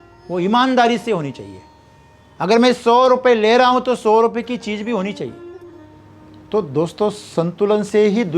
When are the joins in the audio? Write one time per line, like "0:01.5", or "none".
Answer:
0:05.8